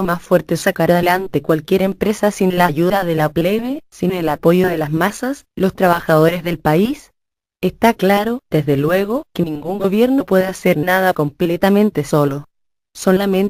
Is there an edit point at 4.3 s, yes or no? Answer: no